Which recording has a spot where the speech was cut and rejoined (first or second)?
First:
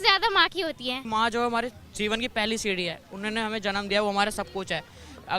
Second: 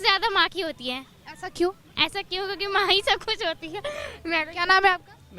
first